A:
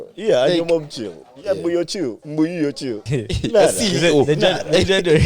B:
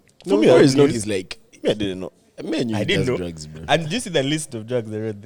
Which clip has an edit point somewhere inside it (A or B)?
A